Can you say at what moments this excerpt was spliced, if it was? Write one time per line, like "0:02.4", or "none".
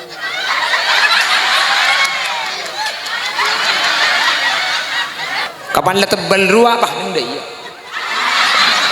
0:05.5